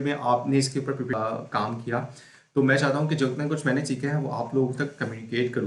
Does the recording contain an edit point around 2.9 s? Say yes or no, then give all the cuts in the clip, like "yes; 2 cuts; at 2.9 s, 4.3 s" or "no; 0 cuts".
no; 1 cut; at 1.1 s